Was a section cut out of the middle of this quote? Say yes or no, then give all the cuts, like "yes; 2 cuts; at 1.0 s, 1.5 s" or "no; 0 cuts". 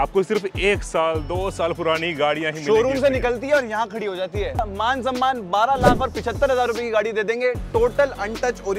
yes; 1 cut; at 4.6 s